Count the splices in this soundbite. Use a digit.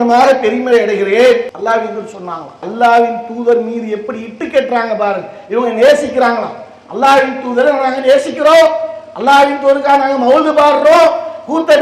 2